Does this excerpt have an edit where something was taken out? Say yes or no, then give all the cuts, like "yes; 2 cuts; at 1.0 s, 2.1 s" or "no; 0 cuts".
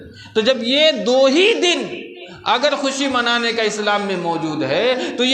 no; 0 cuts